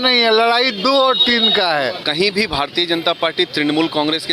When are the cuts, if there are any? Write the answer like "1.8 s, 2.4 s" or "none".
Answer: 2.0 s